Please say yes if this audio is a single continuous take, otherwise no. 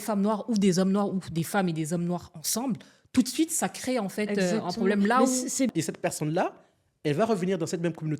no